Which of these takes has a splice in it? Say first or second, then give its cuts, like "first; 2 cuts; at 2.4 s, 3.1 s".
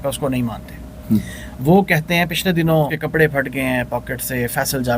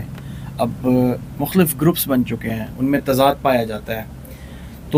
first; 1 cut; at 3.0 s